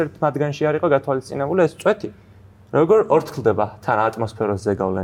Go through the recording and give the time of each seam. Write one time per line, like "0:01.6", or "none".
none